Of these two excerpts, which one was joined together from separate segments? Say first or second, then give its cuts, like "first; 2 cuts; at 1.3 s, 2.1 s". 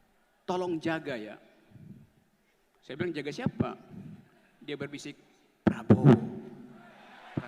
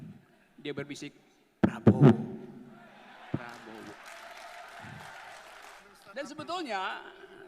second; 1 cut; at 5.8 s